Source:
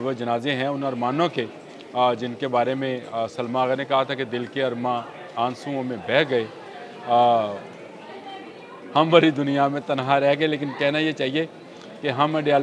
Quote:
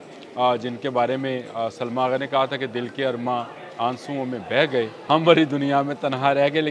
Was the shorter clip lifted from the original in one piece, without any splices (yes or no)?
no